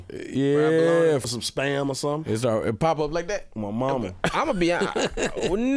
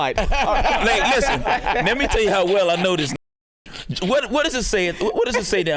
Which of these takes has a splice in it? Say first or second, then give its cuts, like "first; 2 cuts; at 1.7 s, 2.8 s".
first; 1 cut; at 1.2 s